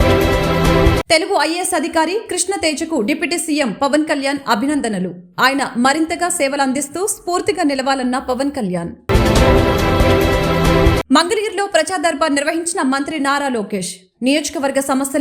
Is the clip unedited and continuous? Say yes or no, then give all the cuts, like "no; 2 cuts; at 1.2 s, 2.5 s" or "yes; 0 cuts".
no; 1 cut; at 1.0 s